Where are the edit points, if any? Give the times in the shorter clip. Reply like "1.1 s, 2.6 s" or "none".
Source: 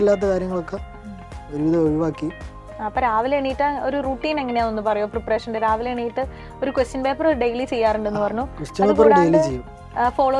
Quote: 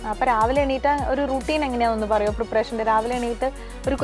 none